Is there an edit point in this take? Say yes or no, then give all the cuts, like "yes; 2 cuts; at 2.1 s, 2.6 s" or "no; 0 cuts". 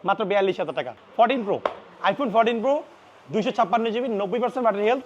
yes; 1 cut; at 1.0 s